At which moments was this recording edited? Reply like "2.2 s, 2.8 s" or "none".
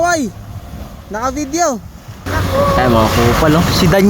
2.1 s